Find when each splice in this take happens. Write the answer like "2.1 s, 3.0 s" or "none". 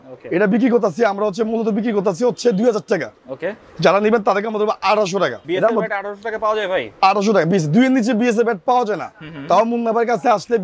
5.4 s